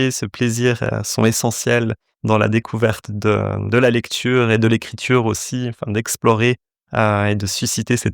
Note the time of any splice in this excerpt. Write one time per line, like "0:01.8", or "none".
none